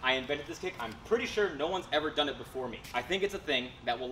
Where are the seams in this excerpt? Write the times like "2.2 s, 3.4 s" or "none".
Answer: 2.8 s